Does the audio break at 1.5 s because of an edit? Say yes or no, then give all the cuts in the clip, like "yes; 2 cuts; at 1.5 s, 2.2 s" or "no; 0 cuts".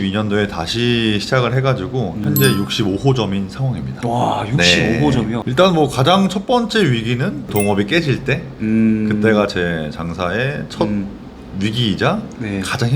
no; 1 cut; at 5.4 s